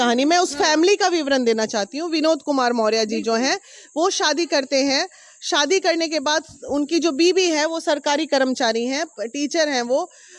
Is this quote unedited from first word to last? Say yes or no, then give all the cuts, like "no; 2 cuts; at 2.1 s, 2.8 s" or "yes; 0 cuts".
yes; 0 cuts